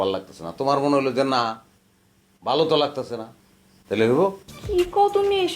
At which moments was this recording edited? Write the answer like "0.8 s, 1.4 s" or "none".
4.5 s